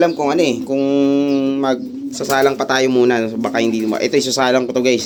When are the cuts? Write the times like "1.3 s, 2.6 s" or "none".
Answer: none